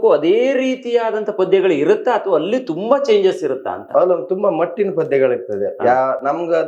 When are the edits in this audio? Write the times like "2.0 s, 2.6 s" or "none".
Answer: none